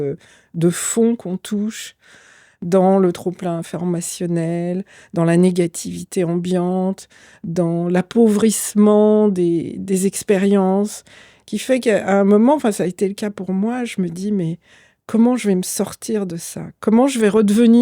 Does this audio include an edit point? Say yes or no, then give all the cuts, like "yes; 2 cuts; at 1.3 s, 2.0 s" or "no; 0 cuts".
no; 0 cuts